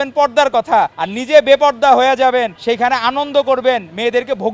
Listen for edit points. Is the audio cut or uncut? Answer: cut